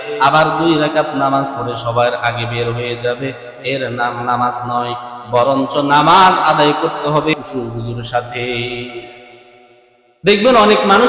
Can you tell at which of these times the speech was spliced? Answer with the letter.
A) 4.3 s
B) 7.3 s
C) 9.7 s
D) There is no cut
B